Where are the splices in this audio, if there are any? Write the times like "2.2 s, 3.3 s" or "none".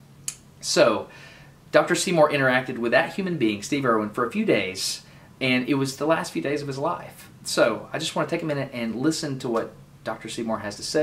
9.7 s